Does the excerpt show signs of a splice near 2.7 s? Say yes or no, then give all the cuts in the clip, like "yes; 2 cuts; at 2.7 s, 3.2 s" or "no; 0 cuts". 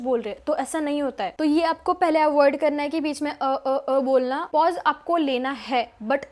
no; 2 cuts; at 1.3 s, 4.5 s